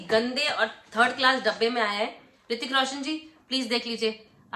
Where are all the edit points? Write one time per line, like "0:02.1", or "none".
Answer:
none

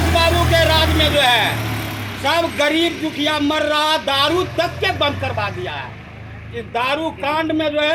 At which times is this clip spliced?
none

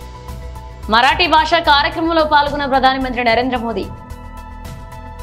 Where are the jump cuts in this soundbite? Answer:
0:03.9

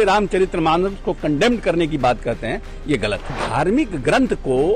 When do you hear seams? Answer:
0:03.3

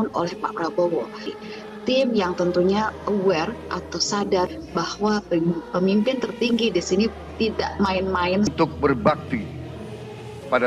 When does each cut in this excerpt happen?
0:08.5

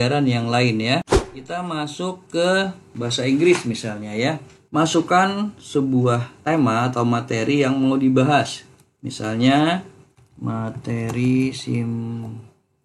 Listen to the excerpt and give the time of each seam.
0:01.1

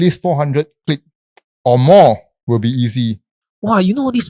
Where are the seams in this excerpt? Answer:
0:03.4

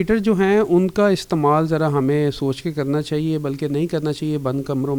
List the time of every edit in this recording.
none

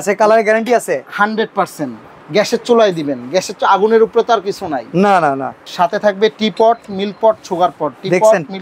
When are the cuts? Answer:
0:05.7

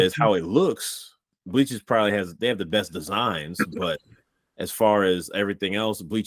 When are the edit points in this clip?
0:01.3

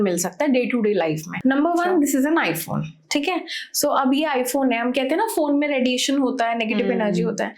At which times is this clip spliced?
0:01.3

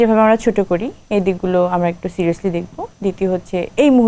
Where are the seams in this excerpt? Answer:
none

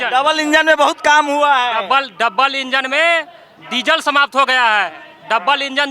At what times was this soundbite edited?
none

